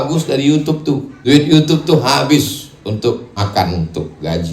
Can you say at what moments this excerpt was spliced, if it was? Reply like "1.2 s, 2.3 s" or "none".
1.1 s, 3.5 s